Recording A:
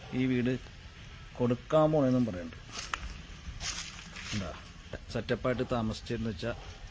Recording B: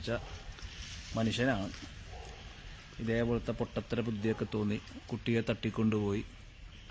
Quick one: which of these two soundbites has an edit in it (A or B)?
A